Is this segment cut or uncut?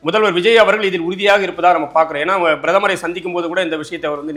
uncut